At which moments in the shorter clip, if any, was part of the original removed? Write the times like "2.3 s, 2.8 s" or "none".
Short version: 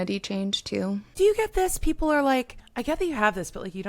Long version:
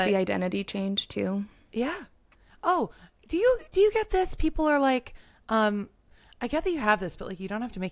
1.1 s, 2.6 s